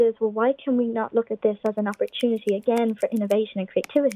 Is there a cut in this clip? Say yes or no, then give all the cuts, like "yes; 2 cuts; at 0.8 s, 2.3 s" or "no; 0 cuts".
no; 0 cuts